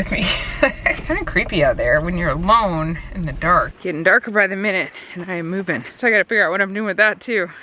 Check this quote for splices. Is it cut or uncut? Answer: cut